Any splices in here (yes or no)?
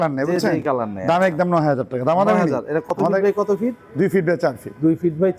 no